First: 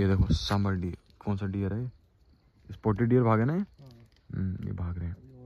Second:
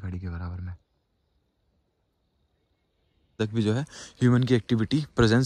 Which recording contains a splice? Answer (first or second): second